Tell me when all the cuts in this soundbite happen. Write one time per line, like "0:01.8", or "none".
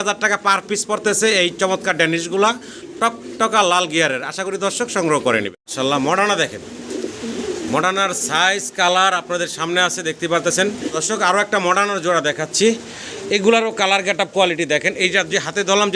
0:05.6
0:10.9